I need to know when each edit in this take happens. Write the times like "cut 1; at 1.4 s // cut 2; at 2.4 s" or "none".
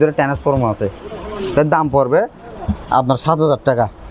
none